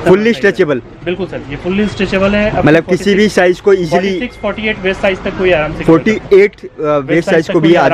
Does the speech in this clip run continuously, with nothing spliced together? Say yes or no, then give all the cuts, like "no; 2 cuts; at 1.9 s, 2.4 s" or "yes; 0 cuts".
yes; 0 cuts